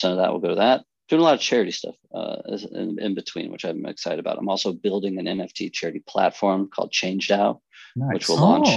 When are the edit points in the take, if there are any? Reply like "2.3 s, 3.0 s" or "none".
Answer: 0.9 s